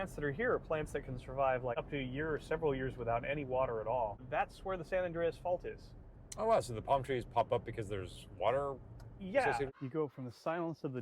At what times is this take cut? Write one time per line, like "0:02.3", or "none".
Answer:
0:01.7
0:04.2
0:09.8